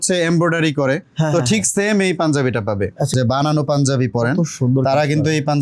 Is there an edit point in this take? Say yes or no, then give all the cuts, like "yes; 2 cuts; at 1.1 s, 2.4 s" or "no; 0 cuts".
yes; 1 cut; at 3.1 s